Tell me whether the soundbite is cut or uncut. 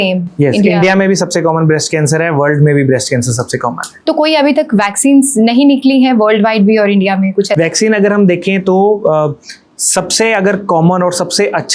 uncut